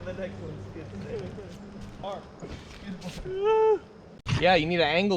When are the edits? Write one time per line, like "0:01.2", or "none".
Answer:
0:02.0
0:04.4